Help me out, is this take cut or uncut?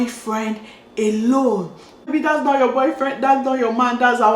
cut